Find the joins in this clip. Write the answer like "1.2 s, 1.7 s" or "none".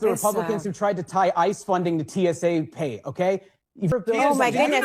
3.9 s